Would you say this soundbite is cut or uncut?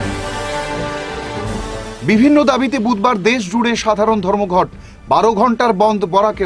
cut